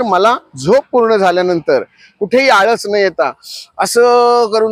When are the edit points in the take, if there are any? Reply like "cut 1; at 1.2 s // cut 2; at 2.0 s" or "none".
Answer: none